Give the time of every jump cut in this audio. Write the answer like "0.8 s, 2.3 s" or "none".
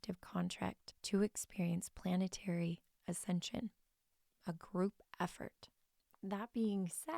0.9 s